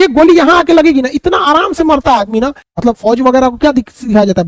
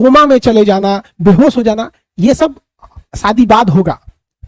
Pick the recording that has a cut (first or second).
first